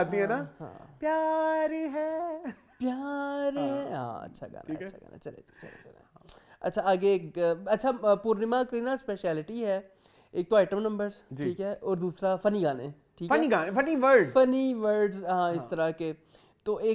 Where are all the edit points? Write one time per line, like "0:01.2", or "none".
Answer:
none